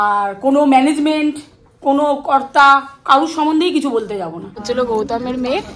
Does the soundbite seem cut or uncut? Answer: cut